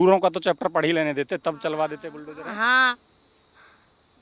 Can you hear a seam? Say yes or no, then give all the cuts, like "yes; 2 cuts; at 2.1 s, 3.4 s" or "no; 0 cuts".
no; 0 cuts